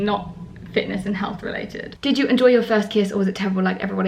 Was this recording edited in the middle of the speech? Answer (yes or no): yes